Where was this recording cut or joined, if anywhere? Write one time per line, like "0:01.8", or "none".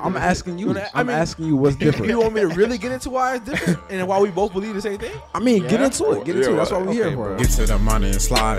0:07.3

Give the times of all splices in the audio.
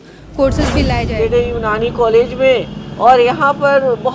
0:01.0

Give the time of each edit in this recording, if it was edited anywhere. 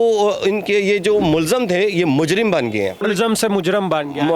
0:03.0

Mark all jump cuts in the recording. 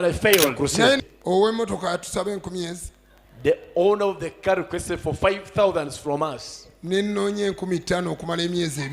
0:01.0

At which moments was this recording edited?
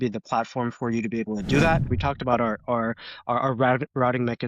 0:01.9

